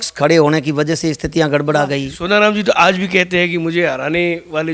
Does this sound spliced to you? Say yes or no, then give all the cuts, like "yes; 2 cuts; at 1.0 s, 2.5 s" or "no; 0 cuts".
yes; 1 cut; at 2.1 s